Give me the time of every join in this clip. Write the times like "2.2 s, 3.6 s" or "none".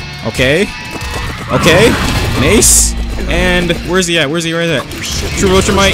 none